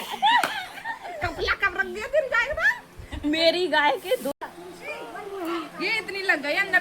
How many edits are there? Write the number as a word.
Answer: one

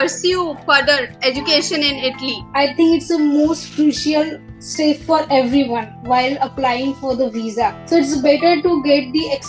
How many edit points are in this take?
two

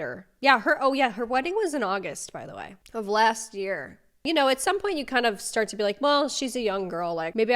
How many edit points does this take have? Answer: one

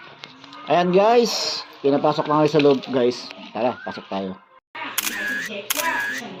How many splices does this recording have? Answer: zero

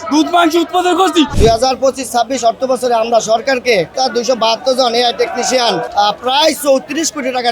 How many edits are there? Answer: three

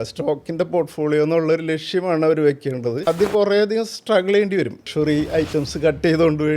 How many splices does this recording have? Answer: two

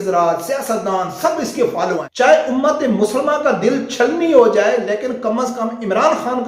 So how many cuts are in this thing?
one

